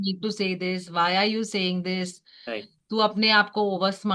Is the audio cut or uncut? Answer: uncut